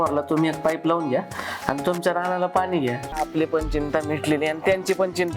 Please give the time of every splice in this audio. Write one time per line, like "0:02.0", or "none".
0:03.2